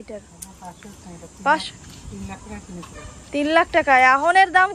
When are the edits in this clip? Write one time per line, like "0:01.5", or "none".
none